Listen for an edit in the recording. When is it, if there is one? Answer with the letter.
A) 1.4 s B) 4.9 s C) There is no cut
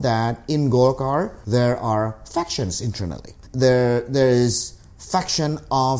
A